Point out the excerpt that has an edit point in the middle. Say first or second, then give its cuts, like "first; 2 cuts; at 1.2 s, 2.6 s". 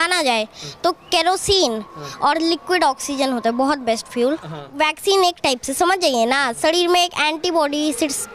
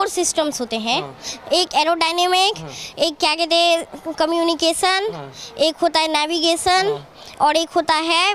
first; 1 cut; at 4.7 s